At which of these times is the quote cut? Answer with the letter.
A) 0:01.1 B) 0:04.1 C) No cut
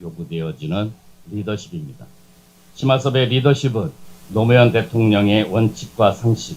A